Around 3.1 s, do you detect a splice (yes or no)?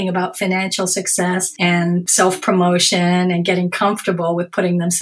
no